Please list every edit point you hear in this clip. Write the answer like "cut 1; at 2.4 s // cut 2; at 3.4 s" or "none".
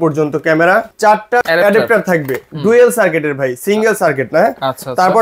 cut 1; at 1.1 s